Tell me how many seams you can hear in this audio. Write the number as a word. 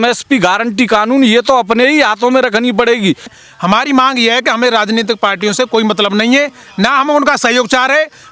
one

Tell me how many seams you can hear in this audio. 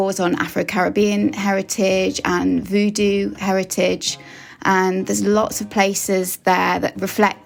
zero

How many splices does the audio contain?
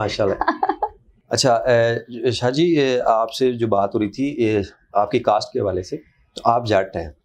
one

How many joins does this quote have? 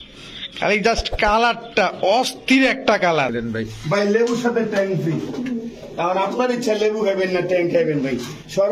one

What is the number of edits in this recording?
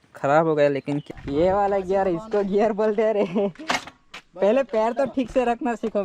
one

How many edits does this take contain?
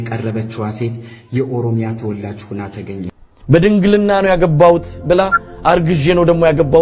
one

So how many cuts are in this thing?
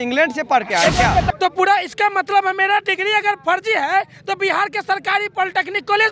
one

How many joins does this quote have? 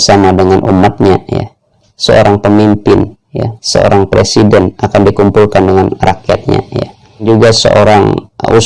two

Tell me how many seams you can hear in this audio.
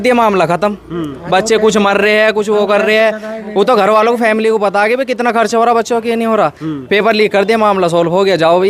zero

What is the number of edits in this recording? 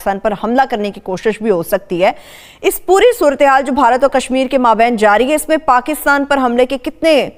zero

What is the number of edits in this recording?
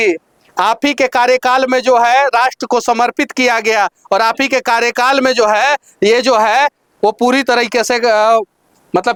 zero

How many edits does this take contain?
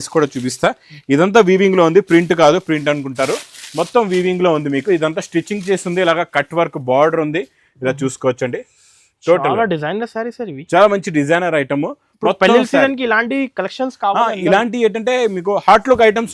zero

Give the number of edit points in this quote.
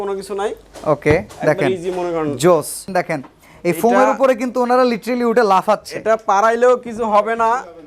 one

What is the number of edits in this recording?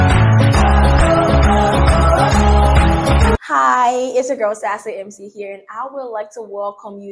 one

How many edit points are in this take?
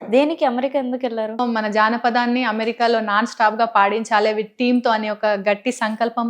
one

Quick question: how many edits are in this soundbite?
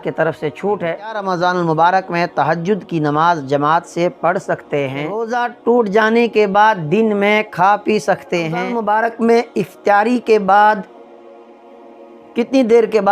three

